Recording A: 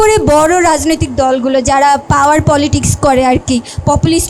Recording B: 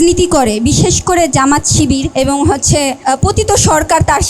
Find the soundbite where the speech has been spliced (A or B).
B